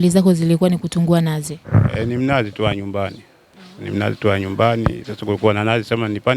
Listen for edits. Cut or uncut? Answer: uncut